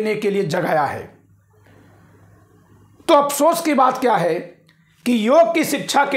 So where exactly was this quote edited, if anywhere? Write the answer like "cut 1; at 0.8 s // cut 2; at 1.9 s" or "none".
none